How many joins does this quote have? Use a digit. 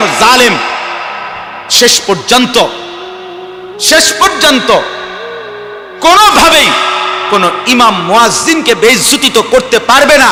0